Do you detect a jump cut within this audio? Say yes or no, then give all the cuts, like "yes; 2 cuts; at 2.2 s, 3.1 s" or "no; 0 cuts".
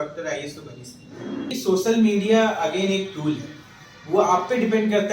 yes; 1 cut; at 1.5 s